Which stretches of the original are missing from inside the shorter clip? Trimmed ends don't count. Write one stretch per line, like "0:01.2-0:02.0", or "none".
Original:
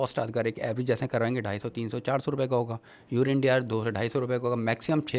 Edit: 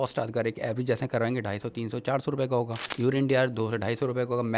0:02.8-0:03.0